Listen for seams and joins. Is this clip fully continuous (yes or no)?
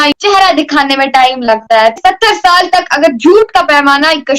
no